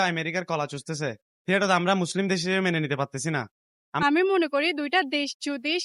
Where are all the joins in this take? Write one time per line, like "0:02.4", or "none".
0:01.3
0:04.0